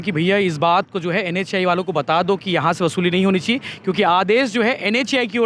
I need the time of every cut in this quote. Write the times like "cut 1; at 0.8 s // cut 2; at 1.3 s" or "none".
none